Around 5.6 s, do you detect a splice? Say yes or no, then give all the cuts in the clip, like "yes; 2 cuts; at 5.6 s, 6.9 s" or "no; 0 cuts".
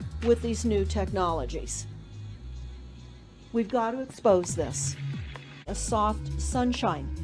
yes; 1 cut; at 5.6 s